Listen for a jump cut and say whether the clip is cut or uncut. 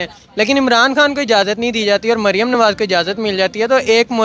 uncut